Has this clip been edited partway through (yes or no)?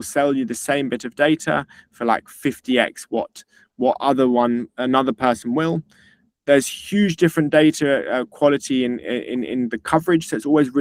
no